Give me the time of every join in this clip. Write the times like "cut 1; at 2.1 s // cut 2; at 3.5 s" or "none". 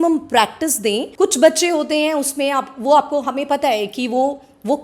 cut 1; at 1.1 s